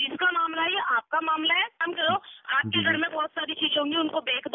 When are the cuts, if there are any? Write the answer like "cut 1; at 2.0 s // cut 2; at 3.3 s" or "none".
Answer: cut 1; at 1.8 s

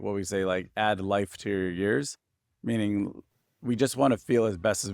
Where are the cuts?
cut 1; at 3.3 s

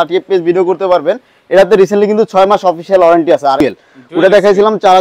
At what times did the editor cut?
cut 1; at 3.6 s

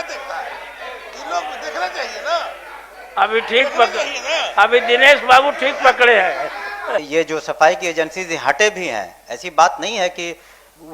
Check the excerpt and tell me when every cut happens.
cut 1; at 7.1 s

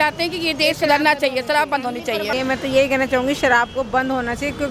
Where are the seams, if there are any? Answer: cut 1; at 2.3 s

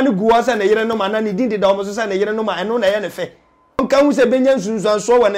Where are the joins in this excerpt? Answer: cut 1; at 3.8 s

